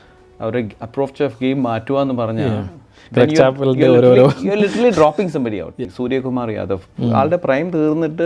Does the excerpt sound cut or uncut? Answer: cut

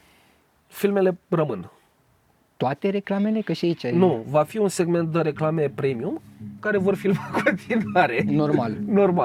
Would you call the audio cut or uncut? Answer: uncut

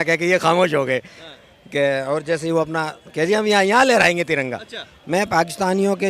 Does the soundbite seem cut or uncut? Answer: cut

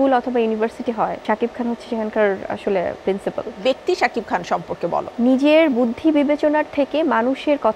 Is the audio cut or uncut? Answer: cut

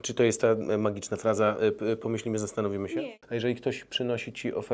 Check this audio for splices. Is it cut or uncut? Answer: cut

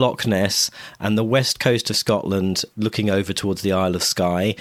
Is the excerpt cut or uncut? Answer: uncut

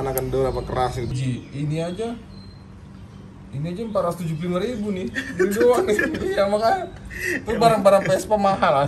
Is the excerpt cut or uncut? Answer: cut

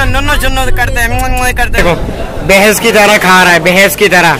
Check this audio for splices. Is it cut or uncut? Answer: cut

